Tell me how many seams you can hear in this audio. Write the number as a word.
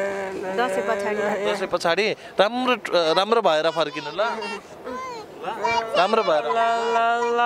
zero